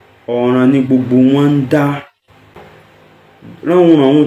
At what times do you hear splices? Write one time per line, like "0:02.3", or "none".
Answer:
0:02.5